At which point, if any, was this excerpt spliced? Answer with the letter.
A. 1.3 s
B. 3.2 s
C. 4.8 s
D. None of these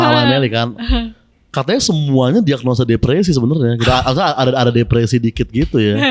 D